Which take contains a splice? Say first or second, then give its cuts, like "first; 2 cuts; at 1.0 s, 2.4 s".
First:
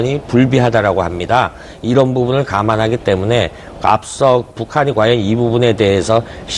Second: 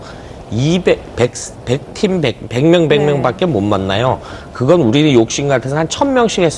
first; 1 cut; at 1.9 s